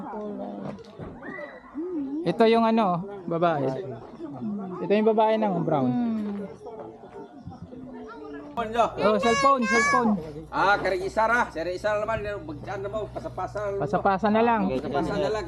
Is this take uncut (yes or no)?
no